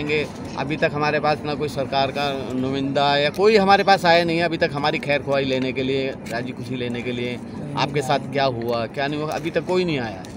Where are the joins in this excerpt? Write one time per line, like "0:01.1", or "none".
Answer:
none